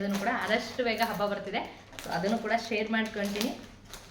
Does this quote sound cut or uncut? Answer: uncut